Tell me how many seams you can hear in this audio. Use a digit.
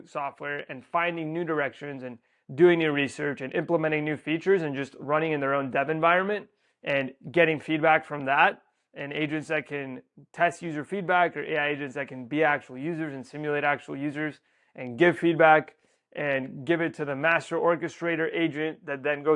0